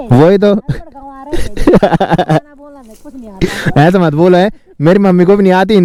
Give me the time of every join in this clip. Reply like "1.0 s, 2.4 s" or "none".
none

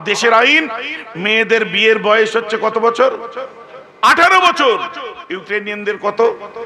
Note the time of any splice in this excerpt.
none

